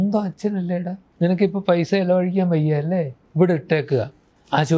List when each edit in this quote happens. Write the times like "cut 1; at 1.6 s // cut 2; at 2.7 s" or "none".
cut 1; at 1.0 s // cut 2; at 3.2 s